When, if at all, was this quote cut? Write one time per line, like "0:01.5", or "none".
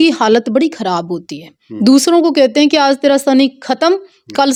none